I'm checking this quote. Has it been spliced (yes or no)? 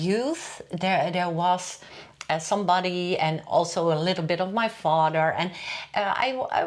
no